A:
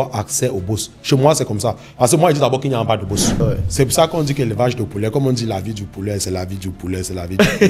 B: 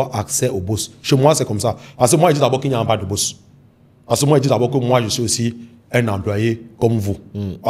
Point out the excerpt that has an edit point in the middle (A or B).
A